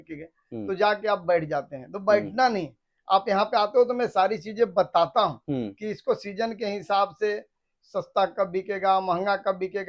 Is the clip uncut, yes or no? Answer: yes